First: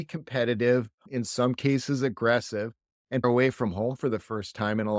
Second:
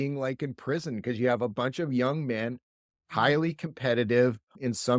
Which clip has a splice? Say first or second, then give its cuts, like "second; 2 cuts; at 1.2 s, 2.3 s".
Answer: first; 1 cut; at 3.2 s